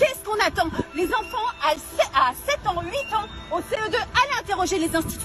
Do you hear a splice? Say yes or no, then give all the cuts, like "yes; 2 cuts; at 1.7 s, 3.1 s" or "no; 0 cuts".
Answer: no; 0 cuts